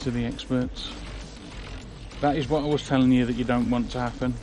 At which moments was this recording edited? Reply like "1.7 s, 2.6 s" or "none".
2.0 s